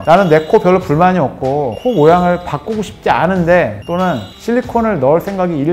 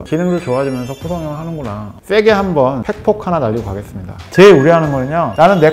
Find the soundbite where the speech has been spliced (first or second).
second